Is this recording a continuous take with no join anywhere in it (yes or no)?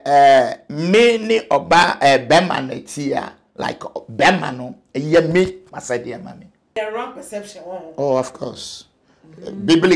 no